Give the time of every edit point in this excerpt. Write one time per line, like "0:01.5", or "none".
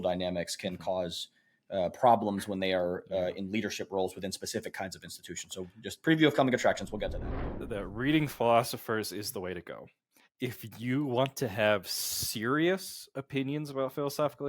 0:07.2